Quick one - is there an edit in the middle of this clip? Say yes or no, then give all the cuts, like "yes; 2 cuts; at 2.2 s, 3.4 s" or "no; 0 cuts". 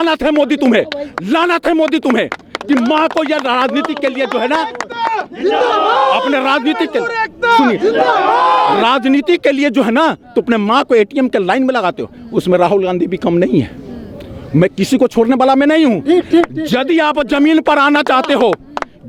no; 0 cuts